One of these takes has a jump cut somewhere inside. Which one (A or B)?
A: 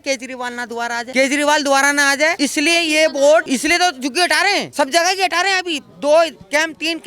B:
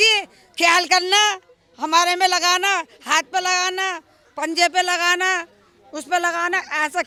A